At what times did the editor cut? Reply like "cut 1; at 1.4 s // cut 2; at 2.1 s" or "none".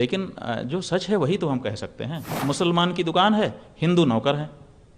cut 1; at 2.3 s